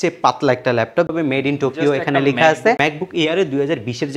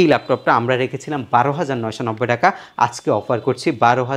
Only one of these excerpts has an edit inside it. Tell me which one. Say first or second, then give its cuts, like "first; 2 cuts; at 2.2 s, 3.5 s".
first; 2 cuts; at 1.1 s, 2.8 s